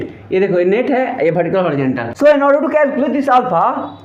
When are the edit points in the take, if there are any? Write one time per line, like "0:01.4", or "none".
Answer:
0:02.1